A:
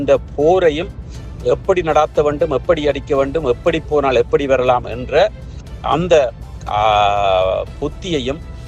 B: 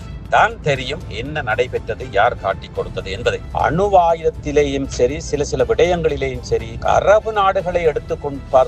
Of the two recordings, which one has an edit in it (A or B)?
B